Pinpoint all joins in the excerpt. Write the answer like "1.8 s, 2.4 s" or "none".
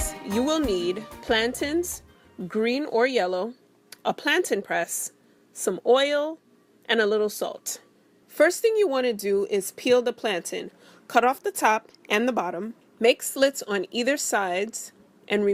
13.2 s